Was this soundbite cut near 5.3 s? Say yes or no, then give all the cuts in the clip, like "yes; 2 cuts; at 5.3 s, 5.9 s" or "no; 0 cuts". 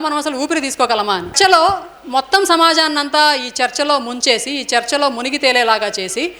no; 1 cut; at 1.3 s